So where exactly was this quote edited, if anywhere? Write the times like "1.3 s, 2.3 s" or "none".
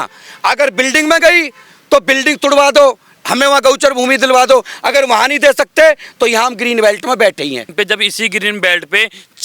7.7 s